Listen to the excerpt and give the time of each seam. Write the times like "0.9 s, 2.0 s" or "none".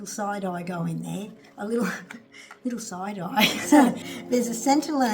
4.1 s